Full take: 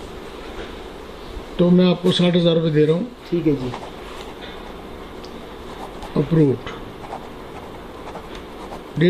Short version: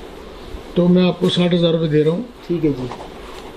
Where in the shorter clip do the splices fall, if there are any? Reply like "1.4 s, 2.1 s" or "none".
none